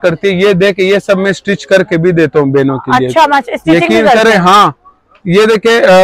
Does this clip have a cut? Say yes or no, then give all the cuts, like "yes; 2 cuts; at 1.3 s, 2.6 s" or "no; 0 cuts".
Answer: no; 0 cuts